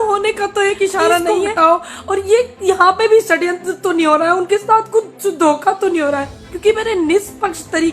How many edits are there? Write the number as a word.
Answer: one